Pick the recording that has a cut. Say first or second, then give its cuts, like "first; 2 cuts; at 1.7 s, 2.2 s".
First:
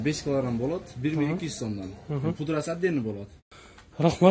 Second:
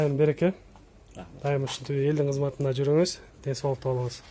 first; 1 cut; at 3.3 s